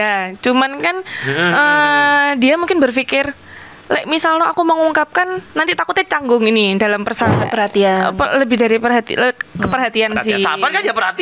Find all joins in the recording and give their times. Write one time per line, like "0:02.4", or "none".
0:07.4